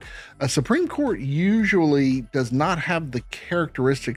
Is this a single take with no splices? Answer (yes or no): yes